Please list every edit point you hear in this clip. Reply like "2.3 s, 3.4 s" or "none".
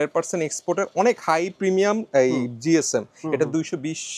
none